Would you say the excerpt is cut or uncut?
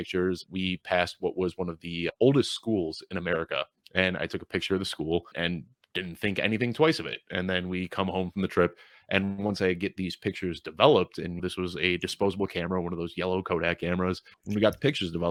uncut